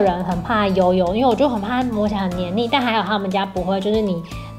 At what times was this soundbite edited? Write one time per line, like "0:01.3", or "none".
none

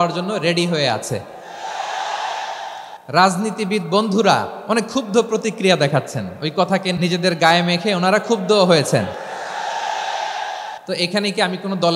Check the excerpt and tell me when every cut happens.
0:02.9
0:04.5
0:07.0
0:10.8

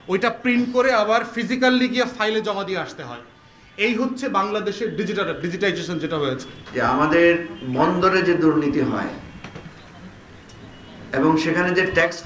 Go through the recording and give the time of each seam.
0:06.6

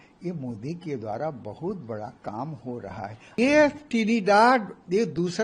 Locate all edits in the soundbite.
0:03.4

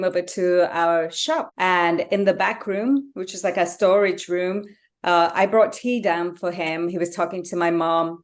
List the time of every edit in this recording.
0:01.5

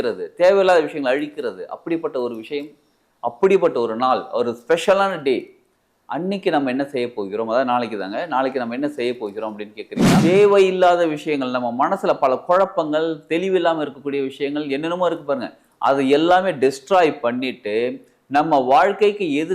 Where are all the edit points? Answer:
0:10.2

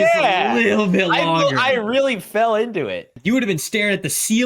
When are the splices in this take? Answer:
0:03.1

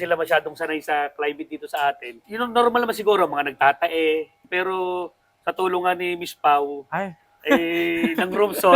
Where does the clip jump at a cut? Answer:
0:02.1
0:04.4

